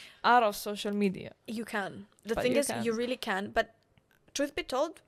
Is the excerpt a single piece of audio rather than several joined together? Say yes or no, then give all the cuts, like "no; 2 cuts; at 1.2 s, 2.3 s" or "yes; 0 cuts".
yes; 0 cuts